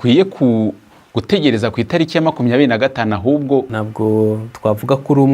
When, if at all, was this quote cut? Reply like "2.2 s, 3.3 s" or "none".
3.7 s